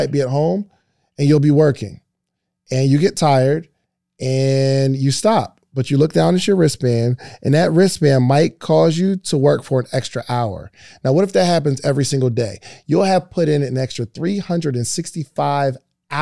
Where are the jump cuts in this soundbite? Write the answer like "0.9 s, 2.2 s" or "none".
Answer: none